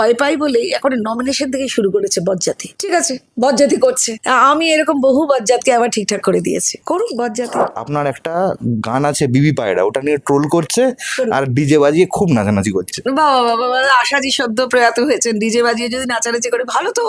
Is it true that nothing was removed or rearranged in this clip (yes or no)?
no